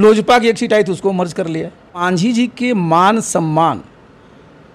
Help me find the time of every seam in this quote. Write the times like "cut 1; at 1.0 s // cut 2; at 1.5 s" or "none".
cut 1; at 2.1 s

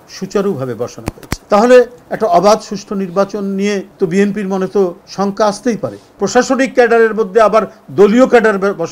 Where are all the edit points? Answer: cut 1; at 1.3 s // cut 2; at 3.9 s // cut 3; at 5.0 s // cut 4; at 6.0 s

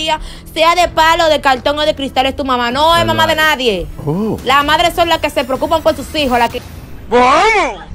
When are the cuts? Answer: cut 1; at 3.9 s // cut 2; at 6.5 s

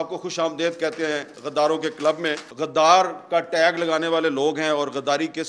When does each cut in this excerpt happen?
cut 1; at 2.5 s

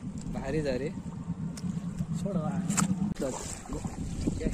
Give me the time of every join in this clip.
cut 1; at 3.1 s

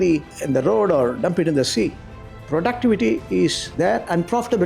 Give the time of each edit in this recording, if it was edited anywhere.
cut 1; at 3.6 s

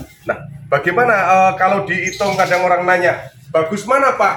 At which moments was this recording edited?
none

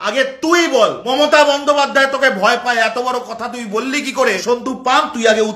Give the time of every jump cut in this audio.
cut 1; at 1.0 s // cut 2; at 4.4 s

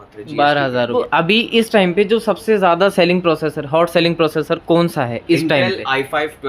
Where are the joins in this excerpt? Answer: cut 1; at 1.0 s

